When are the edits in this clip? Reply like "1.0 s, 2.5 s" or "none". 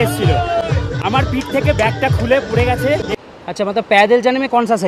3.1 s